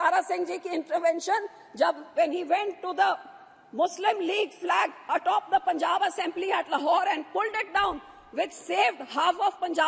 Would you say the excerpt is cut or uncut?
uncut